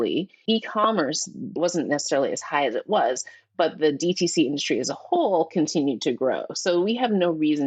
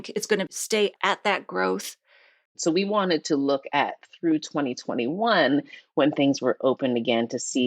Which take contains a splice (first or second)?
second